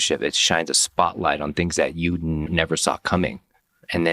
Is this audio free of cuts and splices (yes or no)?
no